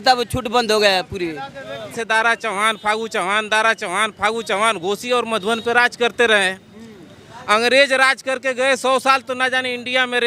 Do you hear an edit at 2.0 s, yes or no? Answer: yes